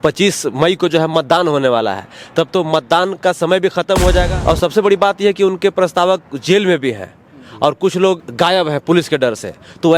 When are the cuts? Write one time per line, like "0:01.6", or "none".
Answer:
0:04.3
0:08.3